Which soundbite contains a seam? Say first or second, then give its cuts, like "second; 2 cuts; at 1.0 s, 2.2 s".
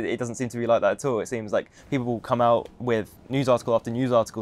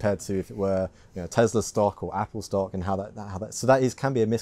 first; 1 cut; at 3.2 s